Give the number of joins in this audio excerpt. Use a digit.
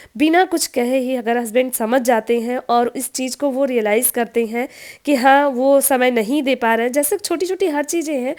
0